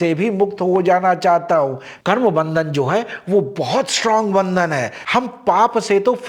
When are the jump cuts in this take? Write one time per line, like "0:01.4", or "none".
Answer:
0:02.0
0:05.0

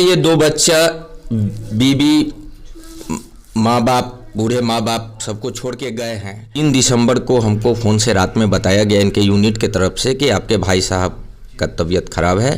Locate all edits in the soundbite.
0:06.6

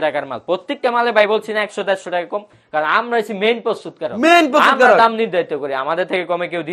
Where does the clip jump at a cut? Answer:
none

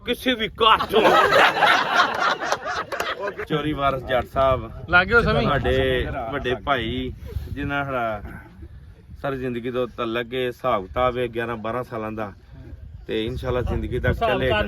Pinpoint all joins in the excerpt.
0:03.4

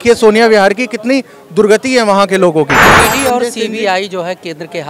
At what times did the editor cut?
0:02.9

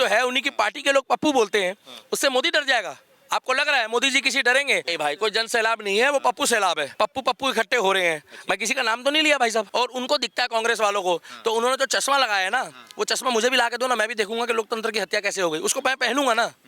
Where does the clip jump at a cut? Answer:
0:04.9
0:06.9
0:09.7

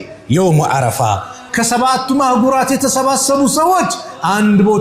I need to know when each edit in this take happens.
0:01.4

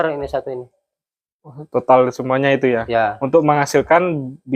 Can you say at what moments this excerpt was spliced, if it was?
none

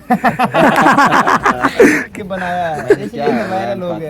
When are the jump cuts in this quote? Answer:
0:02.1

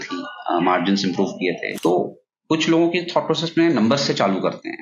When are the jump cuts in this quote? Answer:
0:01.7

